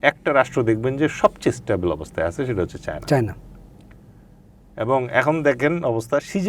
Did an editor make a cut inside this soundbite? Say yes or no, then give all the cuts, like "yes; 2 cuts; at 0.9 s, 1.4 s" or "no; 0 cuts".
no; 0 cuts